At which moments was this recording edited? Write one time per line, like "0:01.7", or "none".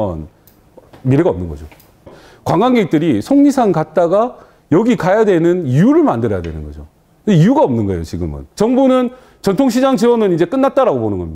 0:02.1
0:08.5